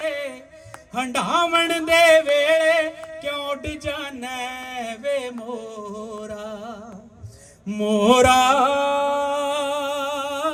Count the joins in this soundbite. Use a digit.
0